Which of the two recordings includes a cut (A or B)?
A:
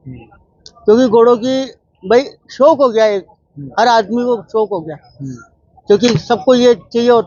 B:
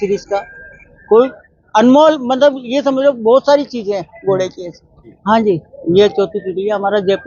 B